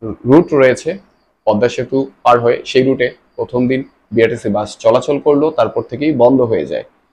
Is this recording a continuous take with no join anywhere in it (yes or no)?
yes